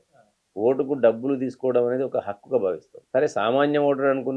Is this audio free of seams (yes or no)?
yes